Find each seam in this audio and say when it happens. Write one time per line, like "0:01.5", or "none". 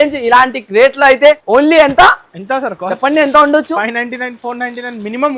0:01.4